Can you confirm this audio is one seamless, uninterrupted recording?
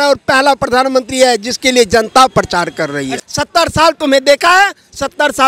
no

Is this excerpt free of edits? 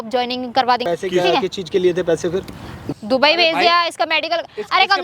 no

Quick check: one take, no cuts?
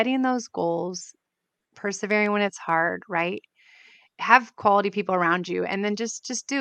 yes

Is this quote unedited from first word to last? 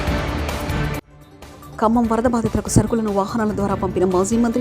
no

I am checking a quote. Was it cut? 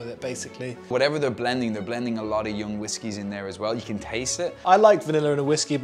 yes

